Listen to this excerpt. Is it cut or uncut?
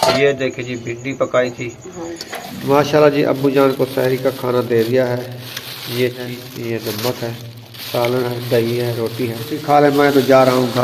cut